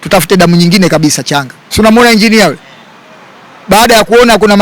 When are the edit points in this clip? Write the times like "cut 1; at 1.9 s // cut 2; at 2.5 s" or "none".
cut 1; at 1.6 s